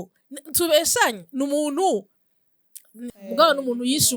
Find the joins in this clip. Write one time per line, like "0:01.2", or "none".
0:03.1

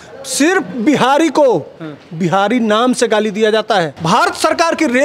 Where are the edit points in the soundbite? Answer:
0:04.0

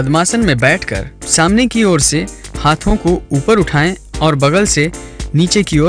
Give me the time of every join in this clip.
none

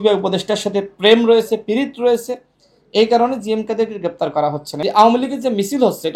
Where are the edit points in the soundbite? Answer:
0:04.7

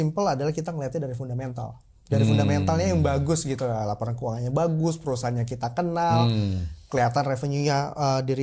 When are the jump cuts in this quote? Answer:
none

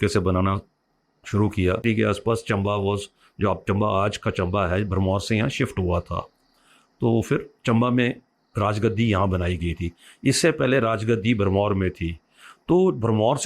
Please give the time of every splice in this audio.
0:01.8

